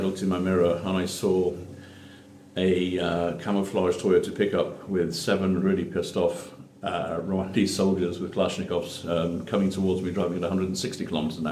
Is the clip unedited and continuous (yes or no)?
yes